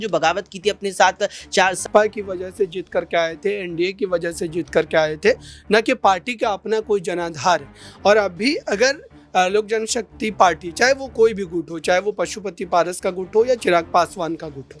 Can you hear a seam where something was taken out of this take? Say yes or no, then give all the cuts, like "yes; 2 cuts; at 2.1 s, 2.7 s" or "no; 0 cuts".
yes; 1 cut; at 1.8 s